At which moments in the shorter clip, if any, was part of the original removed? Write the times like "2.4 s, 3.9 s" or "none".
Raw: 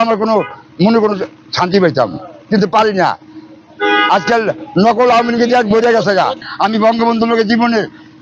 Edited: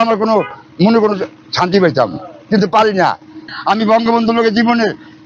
3.5 s